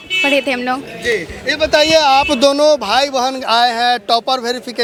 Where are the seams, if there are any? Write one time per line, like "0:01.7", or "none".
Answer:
none